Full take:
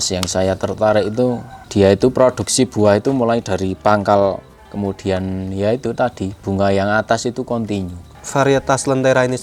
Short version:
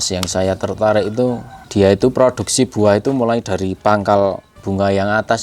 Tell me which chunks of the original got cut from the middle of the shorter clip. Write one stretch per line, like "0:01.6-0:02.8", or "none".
0:04.5-0:06.3